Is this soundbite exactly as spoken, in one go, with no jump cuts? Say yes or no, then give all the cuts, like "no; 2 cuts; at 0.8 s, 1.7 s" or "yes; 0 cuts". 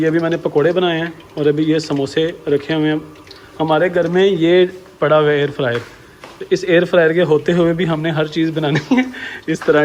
yes; 0 cuts